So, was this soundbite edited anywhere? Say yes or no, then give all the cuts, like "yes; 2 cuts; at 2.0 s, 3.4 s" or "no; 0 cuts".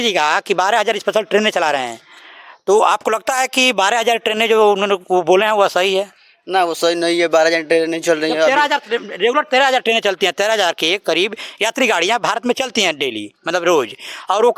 no; 0 cuts